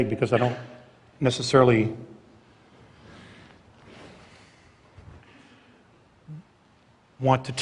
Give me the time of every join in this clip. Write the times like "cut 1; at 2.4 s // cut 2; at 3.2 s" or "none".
cut 1; at 6.6 s